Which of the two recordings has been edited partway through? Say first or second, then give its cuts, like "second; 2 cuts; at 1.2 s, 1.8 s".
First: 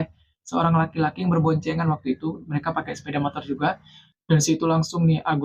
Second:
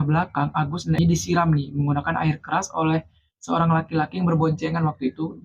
second; 1 cut; at 1.0 s